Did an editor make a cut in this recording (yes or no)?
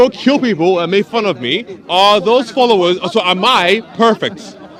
no